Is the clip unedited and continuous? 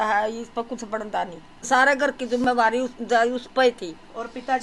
no; 1 cut; at 1.7 s

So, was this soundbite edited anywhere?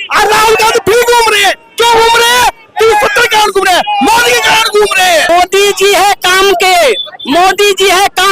yes; 1 cut; at 5.3 s

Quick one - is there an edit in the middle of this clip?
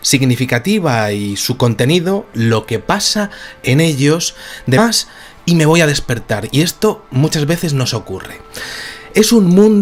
no; 0 cuts

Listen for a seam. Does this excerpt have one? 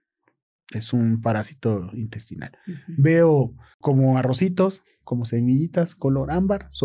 yes; 1 cut; at 3.7 s

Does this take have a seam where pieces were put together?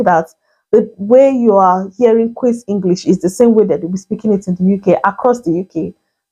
no; 0 cuts

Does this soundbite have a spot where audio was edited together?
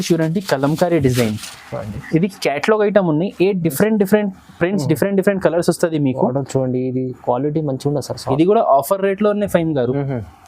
yes; 1 cut; at 8.2 s

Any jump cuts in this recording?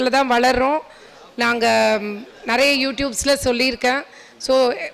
no; 0 cuts

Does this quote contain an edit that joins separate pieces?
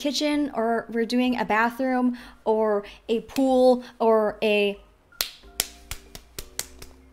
yes; 1 cut; at 5.0 s

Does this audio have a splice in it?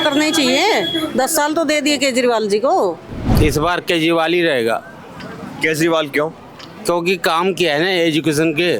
yes; 1 cut; at 3.3 s

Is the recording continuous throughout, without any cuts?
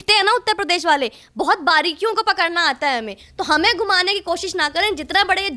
yes; 0 cuts

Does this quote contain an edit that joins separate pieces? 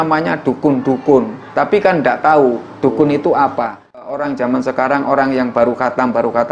yes; 1 cut; at 4.2 s

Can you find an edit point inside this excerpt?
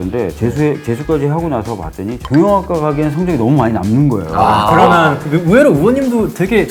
no; 0 cuts

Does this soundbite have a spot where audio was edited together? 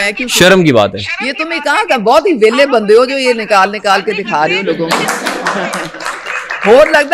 no; 0 cuts

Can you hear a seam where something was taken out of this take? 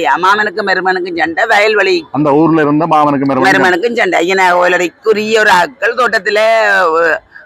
no; 0 cuts

